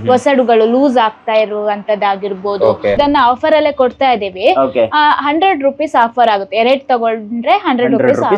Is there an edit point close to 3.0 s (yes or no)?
yes